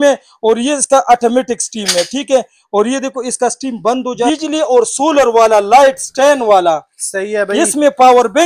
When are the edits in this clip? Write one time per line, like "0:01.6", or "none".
0:04.2